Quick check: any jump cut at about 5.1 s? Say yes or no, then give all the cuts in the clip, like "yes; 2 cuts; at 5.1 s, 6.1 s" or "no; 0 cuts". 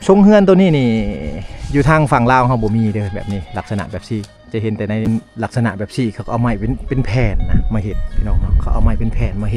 yes; 1 cut; at 5.1 s